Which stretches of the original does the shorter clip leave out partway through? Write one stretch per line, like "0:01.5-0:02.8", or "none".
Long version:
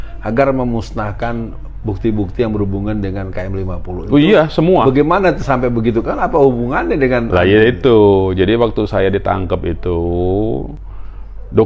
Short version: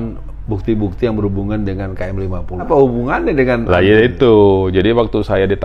0:04.0-0:06.2